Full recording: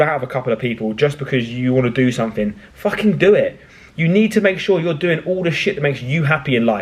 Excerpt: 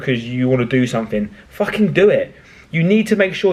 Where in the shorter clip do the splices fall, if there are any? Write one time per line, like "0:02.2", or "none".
none